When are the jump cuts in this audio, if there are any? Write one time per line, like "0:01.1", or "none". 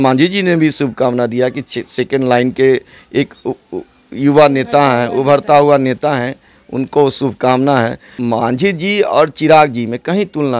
0:08.1